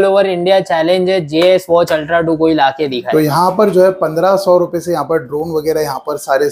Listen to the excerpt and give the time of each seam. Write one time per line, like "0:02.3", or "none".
0:03.1